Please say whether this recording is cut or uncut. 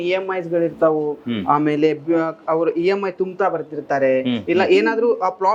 uncut